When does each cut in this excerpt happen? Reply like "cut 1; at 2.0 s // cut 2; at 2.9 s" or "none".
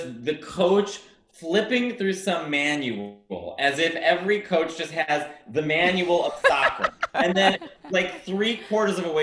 cut 1; at 7.1 s